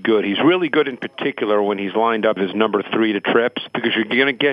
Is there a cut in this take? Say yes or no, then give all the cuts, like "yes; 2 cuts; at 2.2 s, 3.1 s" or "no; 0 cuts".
yes; 2 cuts; at 2.4 s, 3.7 s